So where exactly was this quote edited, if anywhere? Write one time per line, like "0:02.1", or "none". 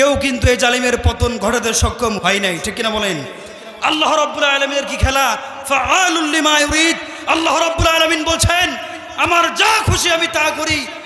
0:02.2